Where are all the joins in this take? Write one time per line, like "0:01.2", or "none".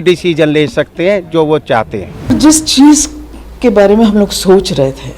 0:02.3